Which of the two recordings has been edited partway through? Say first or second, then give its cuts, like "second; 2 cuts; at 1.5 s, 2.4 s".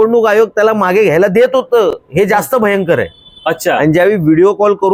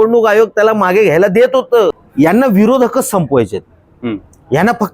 second; 1 cut; at 2.0 s